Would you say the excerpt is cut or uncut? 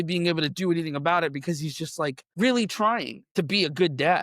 cut